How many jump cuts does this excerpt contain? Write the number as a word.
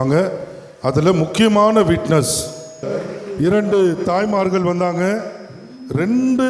one